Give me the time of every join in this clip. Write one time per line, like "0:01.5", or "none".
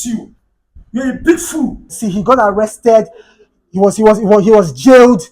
0:01.9